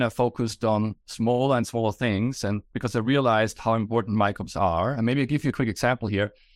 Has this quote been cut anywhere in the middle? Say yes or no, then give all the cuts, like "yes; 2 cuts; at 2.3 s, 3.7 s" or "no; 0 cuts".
no; 0 cuts